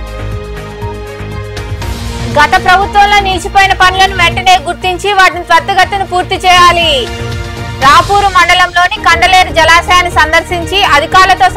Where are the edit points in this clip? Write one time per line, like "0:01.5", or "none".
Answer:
0:01.7